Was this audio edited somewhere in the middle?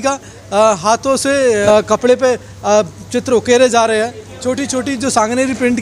yes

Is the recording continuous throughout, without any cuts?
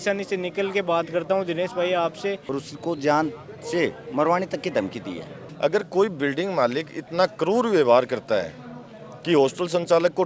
no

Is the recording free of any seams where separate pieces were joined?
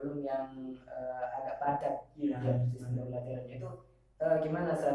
yes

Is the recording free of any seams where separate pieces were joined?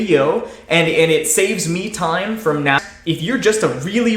no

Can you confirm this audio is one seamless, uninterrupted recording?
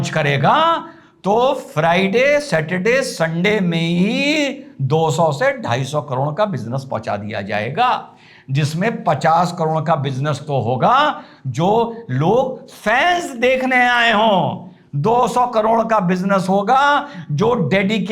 yes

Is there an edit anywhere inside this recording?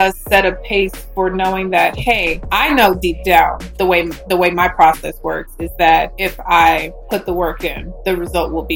yes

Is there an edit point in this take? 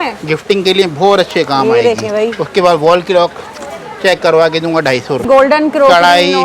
yes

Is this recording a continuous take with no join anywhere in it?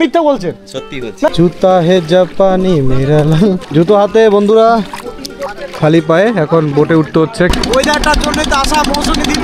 no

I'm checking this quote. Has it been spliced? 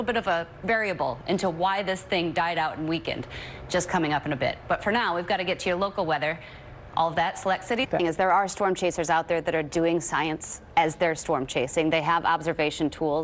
no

